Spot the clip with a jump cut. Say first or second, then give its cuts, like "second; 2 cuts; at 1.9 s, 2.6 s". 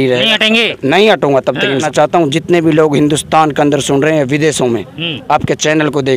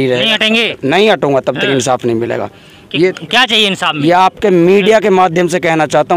first; 1 cut; at 1.8 s